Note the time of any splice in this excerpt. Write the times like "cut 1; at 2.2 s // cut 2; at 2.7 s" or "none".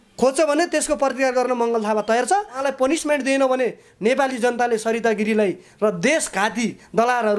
cut 1; at 2.6 s